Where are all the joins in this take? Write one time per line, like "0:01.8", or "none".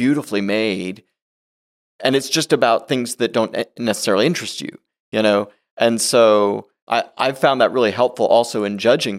0:06.8